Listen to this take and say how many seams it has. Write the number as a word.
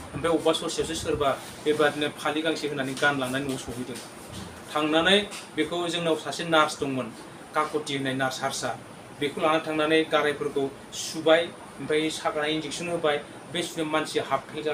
zero